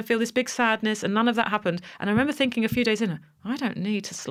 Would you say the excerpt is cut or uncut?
uncut